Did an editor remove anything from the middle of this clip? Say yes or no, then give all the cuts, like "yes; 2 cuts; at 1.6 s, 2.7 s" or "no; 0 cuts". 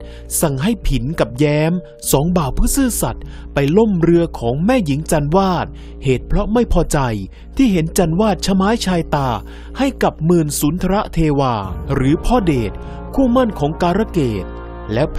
no; 0 cuts